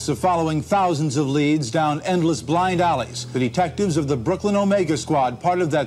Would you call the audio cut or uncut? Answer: cut